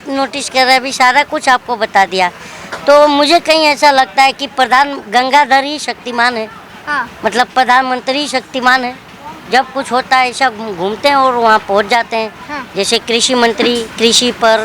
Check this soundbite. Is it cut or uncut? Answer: uncut